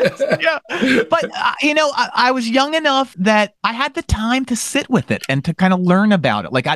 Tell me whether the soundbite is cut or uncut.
uncut